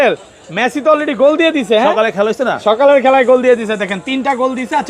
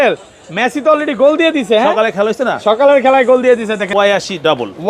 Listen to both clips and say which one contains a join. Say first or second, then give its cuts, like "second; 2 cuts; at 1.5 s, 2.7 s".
second; 1 cut; at 3.9 s